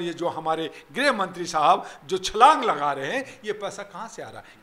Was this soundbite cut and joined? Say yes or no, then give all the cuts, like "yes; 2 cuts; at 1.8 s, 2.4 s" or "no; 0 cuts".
no; 0 cuts